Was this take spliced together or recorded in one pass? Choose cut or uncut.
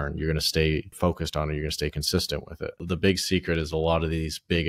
cut